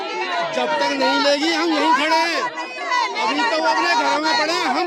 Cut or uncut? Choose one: uncut